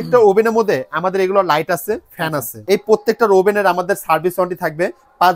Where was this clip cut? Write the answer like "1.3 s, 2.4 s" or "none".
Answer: 2.5 s